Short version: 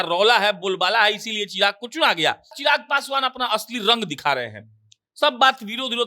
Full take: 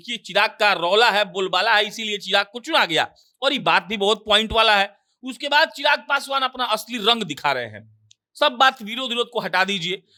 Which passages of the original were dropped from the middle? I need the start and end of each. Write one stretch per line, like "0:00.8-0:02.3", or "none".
0:03.3-0:05.7